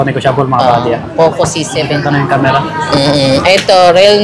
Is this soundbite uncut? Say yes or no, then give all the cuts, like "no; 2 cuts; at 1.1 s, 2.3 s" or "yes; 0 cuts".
no; 1 cut; at 1.7 s